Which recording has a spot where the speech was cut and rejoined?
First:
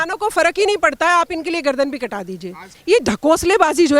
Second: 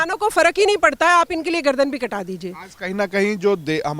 first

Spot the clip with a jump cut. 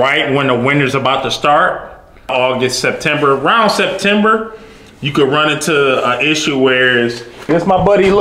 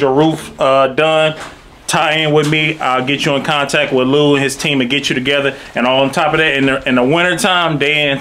first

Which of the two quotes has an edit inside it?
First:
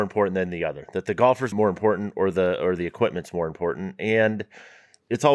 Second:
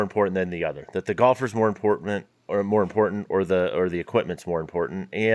first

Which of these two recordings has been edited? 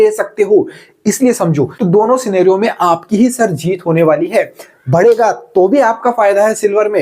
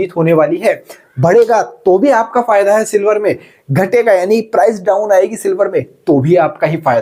first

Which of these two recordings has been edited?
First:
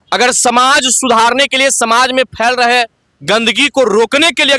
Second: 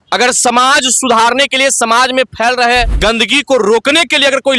second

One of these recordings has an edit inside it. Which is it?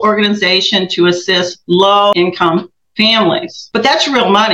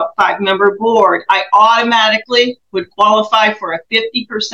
first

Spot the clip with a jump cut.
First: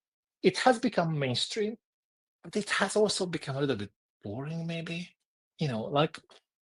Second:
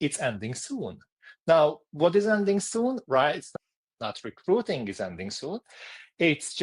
second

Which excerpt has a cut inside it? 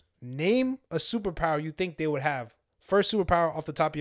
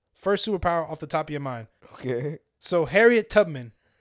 second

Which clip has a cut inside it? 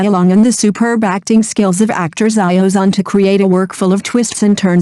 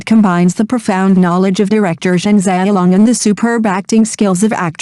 first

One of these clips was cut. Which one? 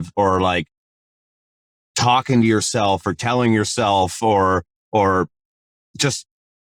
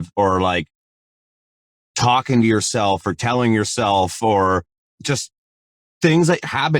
second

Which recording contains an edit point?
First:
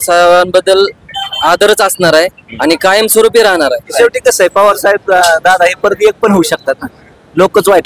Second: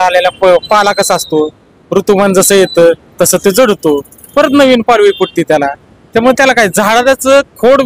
first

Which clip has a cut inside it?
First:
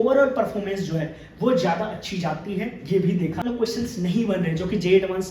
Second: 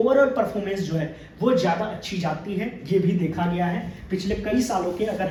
first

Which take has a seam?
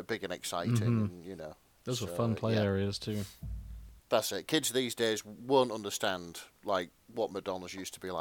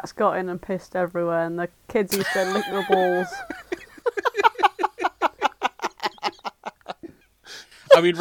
first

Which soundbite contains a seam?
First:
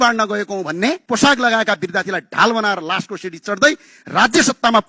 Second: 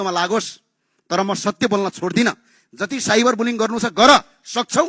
first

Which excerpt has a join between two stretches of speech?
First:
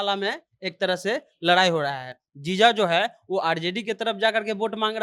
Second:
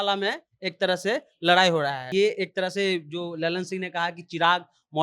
second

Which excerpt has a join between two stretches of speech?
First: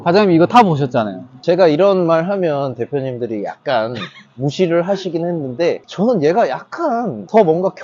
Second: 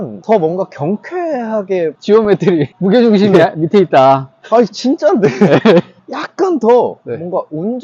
second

